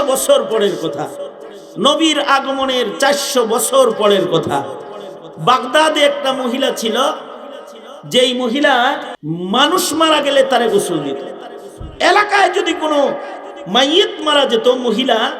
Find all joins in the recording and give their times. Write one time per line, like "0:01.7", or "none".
0:09.1

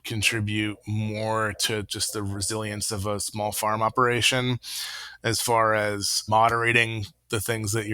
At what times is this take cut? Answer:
0:06.1

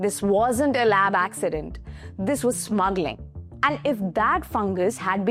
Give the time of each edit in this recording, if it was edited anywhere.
none

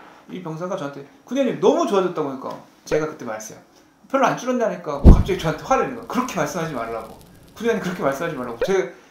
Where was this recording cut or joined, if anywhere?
0:02.7

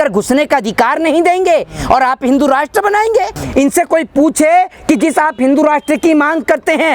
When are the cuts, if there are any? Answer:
0:03.4

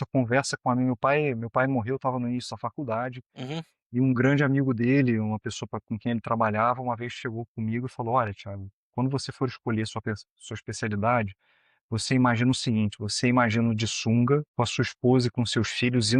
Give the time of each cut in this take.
0:14.5

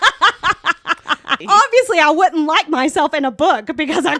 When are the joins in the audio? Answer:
0:01.3

